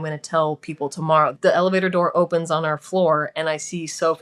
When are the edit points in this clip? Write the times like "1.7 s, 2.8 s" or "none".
1.3 s